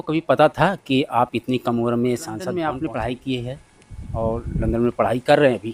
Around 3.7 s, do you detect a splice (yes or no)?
no